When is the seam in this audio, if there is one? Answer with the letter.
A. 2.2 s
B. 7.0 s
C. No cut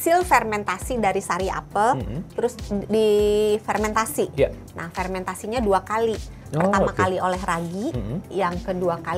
A